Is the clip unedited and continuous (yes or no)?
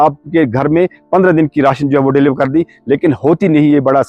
yes